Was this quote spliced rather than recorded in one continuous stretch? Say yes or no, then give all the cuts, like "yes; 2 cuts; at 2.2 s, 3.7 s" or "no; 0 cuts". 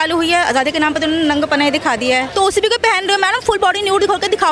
yes; 1 cut; at 2.3 s